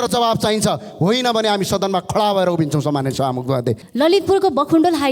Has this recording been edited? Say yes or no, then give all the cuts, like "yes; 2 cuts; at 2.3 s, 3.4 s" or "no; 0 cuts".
yes; 1 cut; at 3.8 s